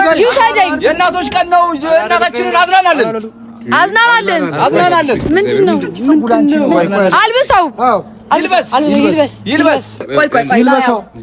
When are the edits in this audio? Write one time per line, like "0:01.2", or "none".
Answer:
0:10.1